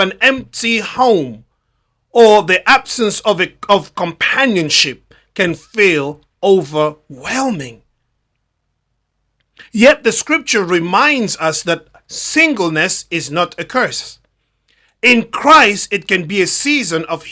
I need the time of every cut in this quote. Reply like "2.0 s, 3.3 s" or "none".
none